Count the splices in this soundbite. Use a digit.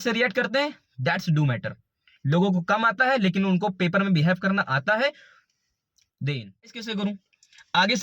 1